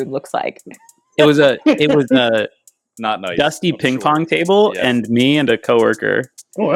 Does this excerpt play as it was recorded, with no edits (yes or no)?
yes